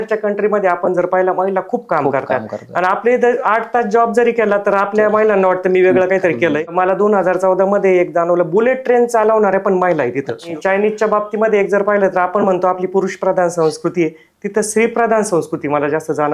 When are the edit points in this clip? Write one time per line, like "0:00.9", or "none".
0:06.7
0:10.5